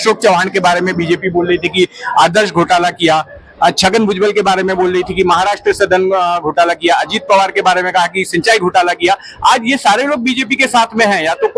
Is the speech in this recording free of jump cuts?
yes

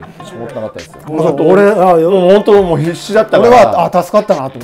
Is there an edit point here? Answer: no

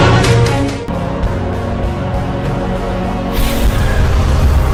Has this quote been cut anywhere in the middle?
no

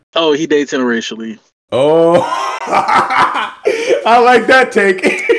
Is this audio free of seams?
yes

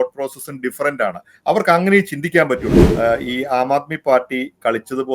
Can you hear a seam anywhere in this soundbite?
yes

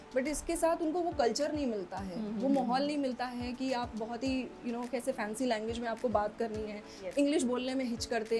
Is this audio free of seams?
yes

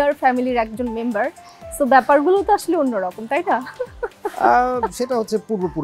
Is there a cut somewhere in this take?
no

